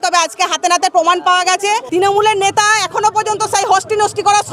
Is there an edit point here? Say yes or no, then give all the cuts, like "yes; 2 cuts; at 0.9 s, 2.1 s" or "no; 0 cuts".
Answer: yes; 1 cut; at 1.8 s